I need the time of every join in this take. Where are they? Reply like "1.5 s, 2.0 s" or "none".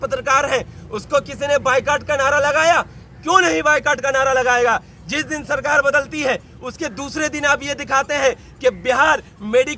none